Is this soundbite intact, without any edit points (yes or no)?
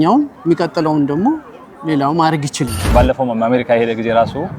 no